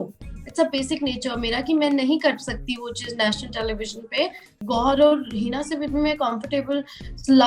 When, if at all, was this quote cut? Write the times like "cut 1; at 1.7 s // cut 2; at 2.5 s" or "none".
cut 1; at 4.5 s